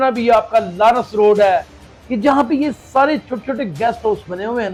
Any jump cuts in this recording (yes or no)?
no